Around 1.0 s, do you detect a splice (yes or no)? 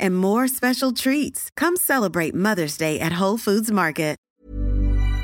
no